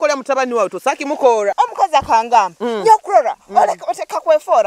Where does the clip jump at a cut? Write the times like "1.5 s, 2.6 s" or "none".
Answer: 1.5 s